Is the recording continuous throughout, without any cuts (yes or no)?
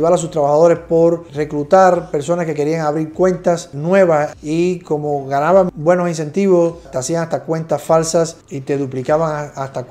yes